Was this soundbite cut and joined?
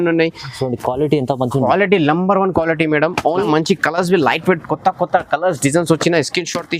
yes; 1 cut; at 3.3 s

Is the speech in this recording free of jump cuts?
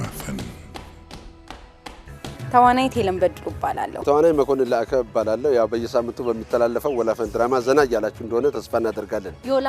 no; 1 cut; at 3.9 s

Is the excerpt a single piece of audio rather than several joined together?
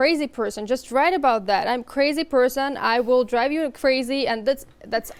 yes; 0 cuts

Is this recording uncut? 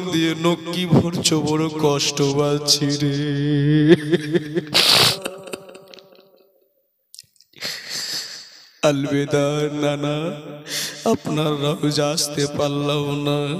no; 1 cut; at 5.2 s

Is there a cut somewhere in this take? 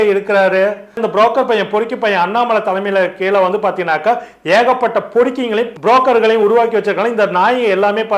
yes; 1 cut; at 1.0 s

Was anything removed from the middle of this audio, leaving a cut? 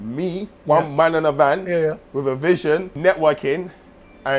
yes; 1 cut; at 2.9 s

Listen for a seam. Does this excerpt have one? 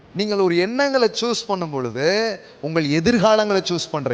no; 0 cuts

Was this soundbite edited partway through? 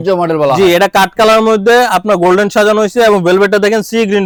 no; 0 cuts

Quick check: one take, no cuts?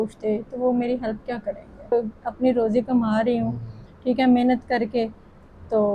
no; 1 cut; at 1.9 s

